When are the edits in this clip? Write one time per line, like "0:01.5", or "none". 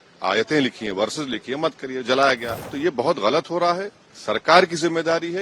0:02.5